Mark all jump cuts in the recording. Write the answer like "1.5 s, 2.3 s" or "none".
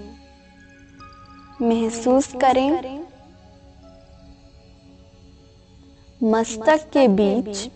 1.0 s